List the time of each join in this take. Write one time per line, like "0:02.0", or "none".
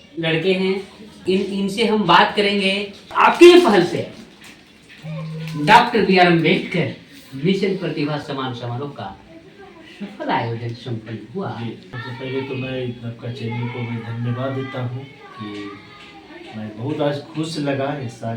0:01.2
0:03.0
0:12.0